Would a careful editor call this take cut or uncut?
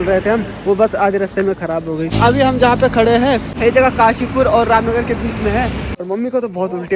cut